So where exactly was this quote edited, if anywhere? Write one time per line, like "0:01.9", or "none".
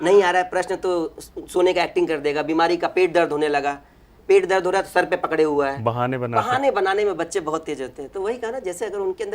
none